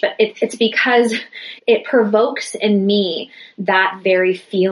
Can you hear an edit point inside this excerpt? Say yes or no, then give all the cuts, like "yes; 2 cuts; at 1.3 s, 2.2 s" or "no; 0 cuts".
yes; 1 cut; at 1.5 s